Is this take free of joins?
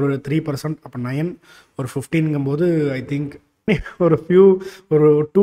no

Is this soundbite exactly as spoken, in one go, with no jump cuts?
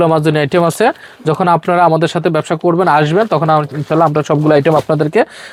yes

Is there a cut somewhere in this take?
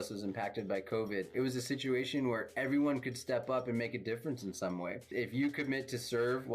yes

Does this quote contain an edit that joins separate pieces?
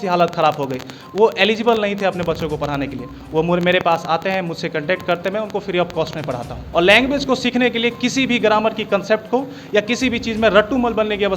yes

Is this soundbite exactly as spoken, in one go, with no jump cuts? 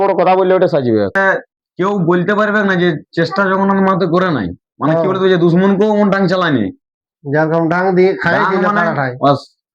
no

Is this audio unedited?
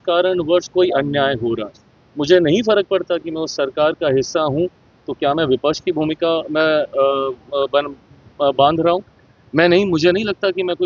yes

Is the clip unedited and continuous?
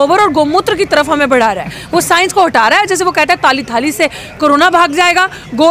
yes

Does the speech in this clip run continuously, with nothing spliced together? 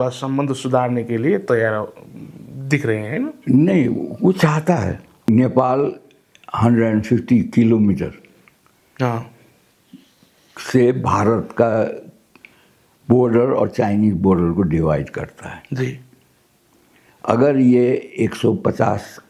no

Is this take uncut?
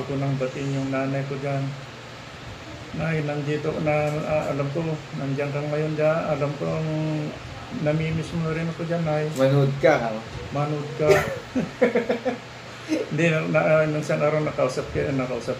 yes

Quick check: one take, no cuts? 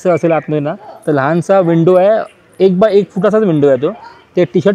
yes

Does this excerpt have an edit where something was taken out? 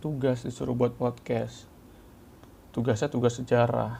no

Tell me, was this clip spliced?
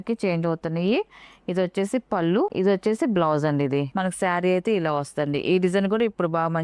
yes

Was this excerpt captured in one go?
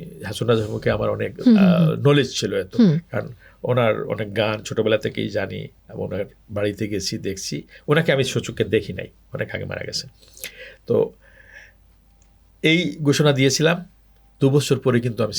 yes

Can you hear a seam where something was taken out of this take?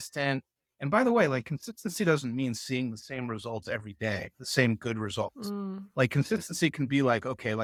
no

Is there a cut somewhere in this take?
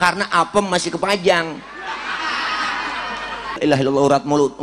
yes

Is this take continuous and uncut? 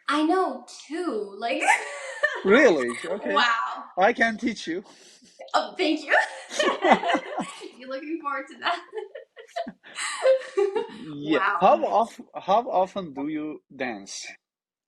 yes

